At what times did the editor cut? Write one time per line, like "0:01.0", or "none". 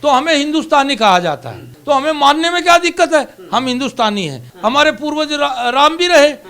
0:01.7
0:04.5